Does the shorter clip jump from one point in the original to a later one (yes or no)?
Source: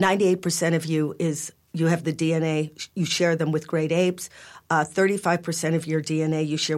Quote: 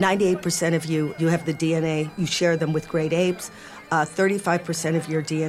yes